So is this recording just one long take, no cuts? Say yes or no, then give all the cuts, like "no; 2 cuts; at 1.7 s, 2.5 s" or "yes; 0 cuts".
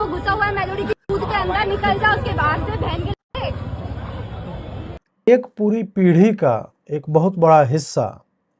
no; 1 cut; at 5.3 s